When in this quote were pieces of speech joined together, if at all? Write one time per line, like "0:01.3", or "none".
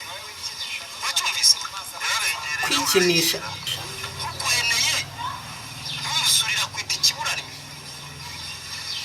0:03.7